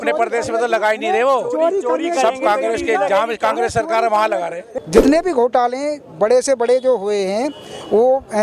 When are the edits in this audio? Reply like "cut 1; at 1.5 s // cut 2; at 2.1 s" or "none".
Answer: cut 1; at 4.6 s